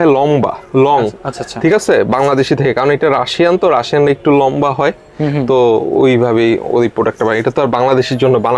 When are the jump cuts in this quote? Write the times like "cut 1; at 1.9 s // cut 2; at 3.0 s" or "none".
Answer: none